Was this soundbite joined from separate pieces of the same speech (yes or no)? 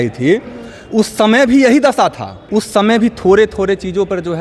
yes